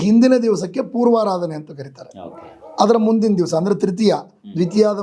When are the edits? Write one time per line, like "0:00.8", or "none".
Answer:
none